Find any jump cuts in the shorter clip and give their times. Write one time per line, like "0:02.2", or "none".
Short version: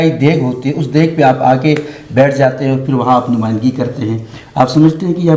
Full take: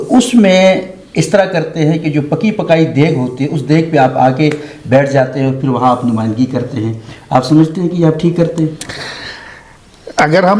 none